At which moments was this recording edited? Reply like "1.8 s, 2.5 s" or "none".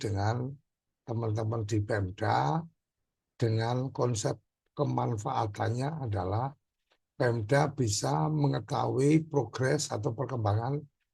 none